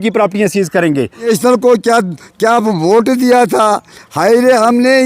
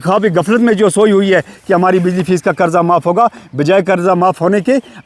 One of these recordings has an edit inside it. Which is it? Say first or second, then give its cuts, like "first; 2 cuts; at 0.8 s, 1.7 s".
first; 1 cut; at 1.3 s